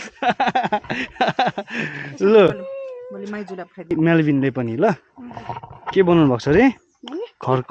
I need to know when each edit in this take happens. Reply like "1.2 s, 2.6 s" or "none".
3.9 s